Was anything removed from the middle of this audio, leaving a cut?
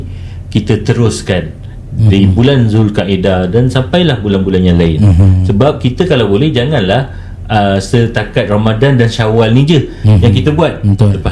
no; 0 cuts

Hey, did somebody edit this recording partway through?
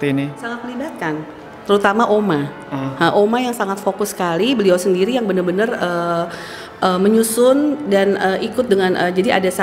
no; 0 cuts

